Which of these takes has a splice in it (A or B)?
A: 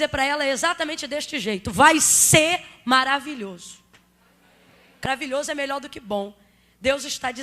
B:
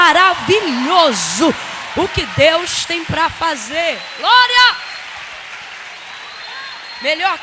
A